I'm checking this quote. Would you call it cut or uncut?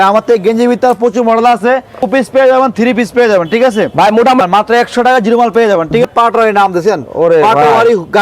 cut